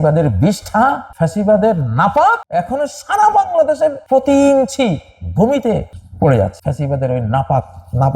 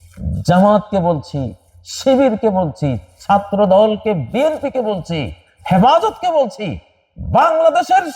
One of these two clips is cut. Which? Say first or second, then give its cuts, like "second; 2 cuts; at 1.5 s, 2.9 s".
first; 5 cuts; at 1.1 s, 2.4 s, 4.0 s, 6.0 s, 6.6 s